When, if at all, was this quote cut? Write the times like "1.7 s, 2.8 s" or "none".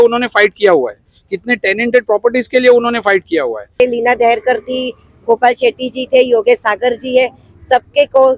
3.8 s